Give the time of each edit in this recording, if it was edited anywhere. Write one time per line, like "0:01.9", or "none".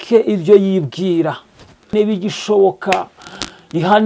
0:01.9

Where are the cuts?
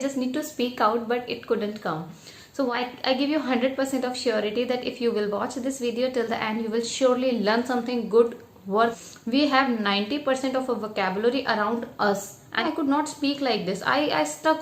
0:02.7
0:08.9
0:12.6

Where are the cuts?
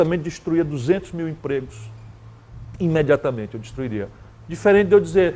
none

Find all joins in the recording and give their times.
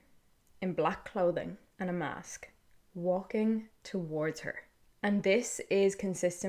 0:01.6

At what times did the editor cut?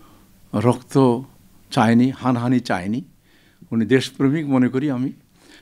none

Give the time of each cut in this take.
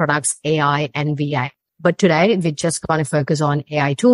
0:01.6

